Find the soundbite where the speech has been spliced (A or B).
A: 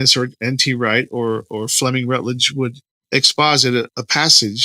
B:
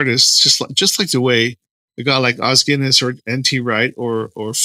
A